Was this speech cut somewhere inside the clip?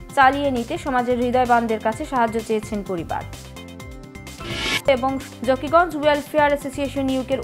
no; 0 cuts

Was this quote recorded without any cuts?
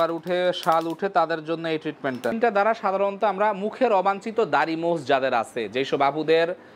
no; 1 cut; at 2.4 s

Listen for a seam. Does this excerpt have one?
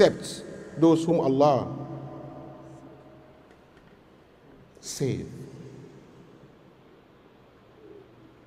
no; 0 cuts

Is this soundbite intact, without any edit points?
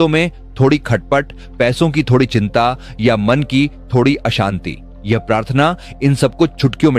yes; 0 cuts

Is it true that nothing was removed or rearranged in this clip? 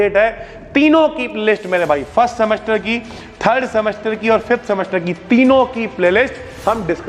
yes; 0 cuts

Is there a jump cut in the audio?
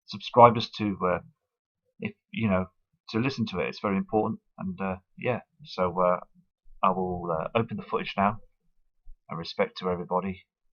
yes; 1 cut; at 7.6 s

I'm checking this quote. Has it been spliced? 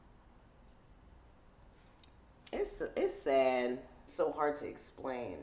yes; 1 cut; at 4.0 s

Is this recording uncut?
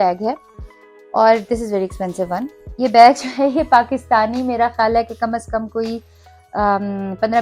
no; 1 cut; at 2.6 s

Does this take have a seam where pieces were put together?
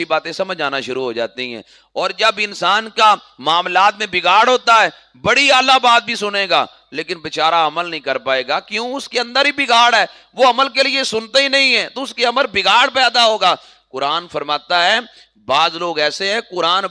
no; 0 cuts

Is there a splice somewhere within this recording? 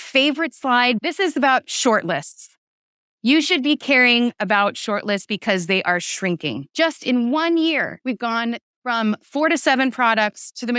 yes; 3 cuts; at 1.0 s, 6.7 s, 7.9 s

